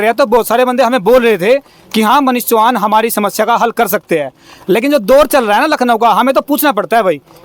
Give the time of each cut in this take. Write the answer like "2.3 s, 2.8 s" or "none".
none